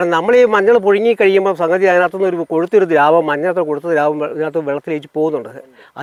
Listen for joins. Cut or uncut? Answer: uncut